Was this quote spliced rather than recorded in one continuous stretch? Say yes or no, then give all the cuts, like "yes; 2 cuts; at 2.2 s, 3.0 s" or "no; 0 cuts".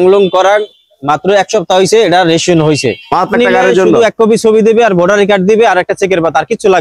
yes; 1 cut; at 3.3 s